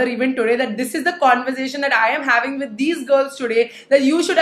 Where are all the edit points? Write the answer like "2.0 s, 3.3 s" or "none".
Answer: none